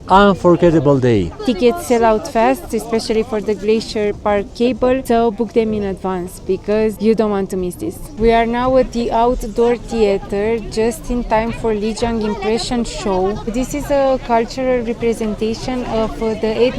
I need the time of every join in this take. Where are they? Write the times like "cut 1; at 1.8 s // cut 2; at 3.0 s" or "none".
cut 1; at 1.4 s // cut 2; at 5.0 s // cut 3; at 7.0 s // cut 4; at 8.0 s // cut 5; at 13.5 s